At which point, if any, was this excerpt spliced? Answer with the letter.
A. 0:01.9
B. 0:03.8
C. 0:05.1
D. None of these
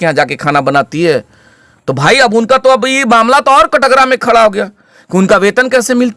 D